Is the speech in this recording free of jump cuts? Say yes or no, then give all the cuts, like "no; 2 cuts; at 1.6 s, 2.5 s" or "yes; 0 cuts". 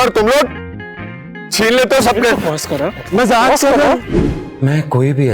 no; 1 cut; at 4.2 s